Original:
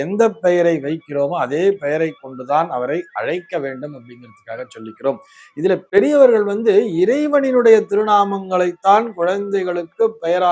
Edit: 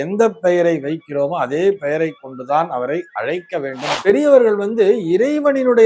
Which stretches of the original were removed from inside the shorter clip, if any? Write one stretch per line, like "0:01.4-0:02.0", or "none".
0:04.0-0:05.8